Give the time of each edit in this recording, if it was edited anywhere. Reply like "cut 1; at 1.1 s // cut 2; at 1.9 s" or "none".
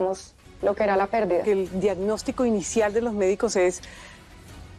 cut 1; at 1.4 s